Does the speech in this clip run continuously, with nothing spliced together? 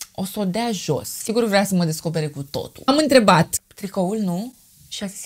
no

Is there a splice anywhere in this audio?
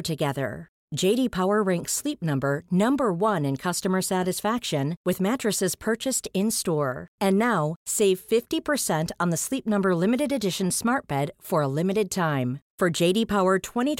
no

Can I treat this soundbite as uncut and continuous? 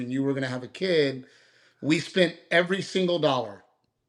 yes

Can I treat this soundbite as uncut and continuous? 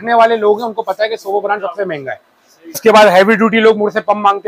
no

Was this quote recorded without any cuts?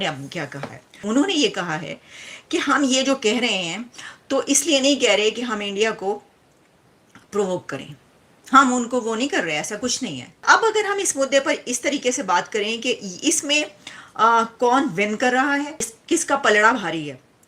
no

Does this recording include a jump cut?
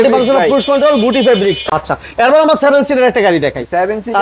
yes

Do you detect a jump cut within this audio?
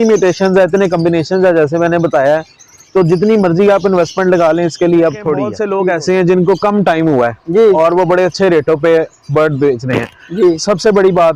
yes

